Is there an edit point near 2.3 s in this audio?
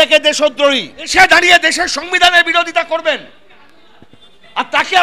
no; 1 cut; at 1.1 s

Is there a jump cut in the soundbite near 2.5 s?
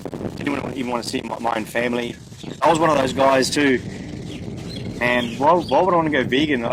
yes; 1 cut; at 2.5 s

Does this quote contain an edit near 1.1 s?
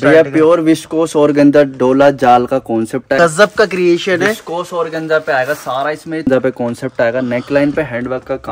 no; 2 cuts; at 3.2 s, 6.3 s

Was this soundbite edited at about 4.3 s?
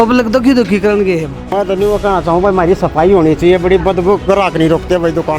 no; 1 cut; at 1.5 s

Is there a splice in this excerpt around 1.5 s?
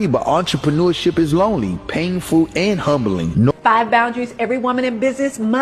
no; 1 cut; at 3.5 s

